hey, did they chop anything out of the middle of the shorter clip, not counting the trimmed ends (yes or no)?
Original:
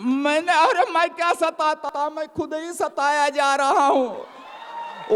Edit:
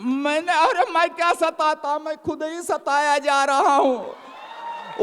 yes